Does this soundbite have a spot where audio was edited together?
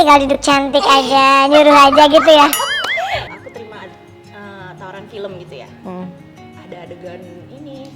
yes; 1 cut; at 3.3 s

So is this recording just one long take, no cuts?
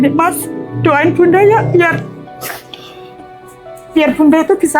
yes; 0 cuts

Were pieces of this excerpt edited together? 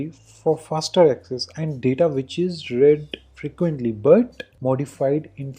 yes; 1 cut; at 4.4 s

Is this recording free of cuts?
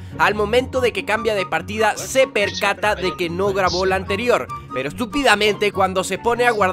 no; 1 cut; at 1.7 s

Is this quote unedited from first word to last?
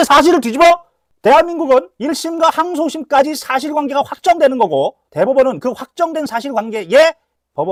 yes; 0 cuts

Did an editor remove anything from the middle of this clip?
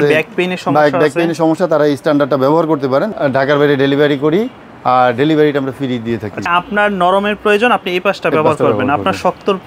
yes; 2 cuts; at 3.1 s, 6.5 s

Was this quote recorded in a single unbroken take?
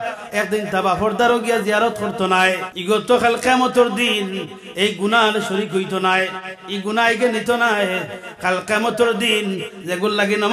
no; 1 cut; at 2.7 s

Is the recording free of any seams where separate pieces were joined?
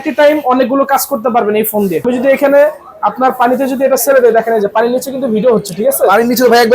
no; 1 cut; at 2.0 s

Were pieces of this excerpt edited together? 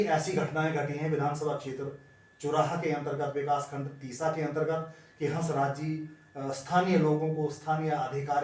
no; 0 cuts

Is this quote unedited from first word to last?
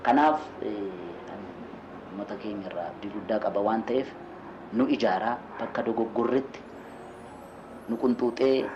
yes; 0 cuts

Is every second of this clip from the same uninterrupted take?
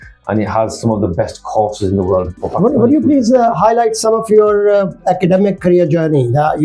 no; 1 cut; at 2.4 s

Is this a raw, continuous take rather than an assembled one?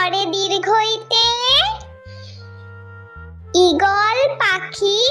yes; 0 cuts

